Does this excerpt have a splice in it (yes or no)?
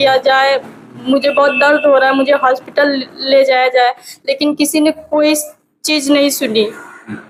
no